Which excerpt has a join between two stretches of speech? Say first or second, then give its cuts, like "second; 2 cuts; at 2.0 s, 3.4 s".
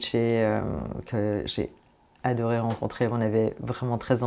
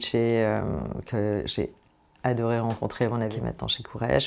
second; 1 cut; at 3.3 s